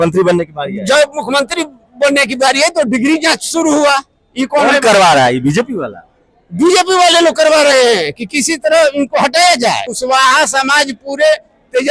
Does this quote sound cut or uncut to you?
cut